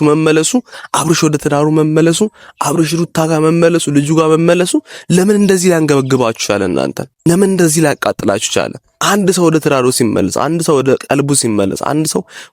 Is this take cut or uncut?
cut